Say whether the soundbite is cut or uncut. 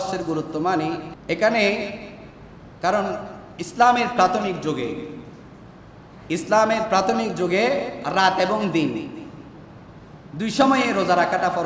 cut